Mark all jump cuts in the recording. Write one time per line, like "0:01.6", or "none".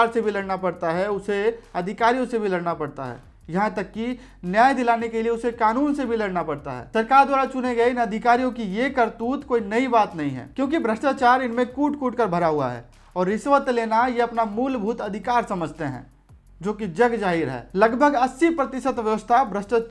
none